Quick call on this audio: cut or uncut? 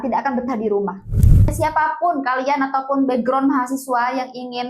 cut